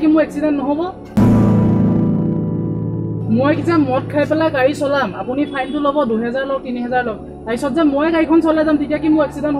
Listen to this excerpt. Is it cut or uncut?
cut